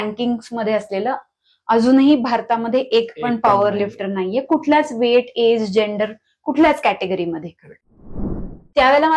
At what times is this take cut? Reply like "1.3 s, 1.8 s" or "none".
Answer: 8.1 s